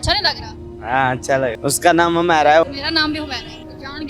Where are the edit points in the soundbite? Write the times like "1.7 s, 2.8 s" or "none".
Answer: 1.6 s, 2.6 s